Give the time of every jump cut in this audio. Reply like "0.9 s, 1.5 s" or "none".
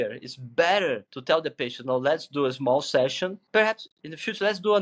1.1 s, 3.4 s